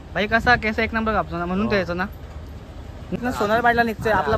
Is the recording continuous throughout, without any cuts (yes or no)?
no